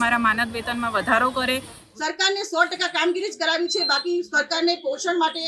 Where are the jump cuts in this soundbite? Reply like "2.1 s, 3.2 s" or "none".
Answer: 1.8 s